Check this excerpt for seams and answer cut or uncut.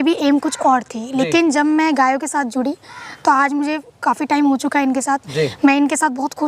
cut